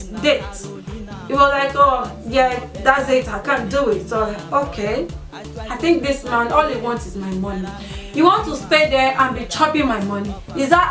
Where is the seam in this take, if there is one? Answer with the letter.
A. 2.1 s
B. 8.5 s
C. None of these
C